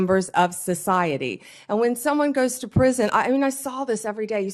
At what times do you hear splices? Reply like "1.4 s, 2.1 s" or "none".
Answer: none